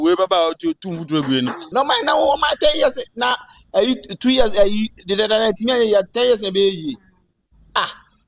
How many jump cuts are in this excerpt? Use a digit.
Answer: 1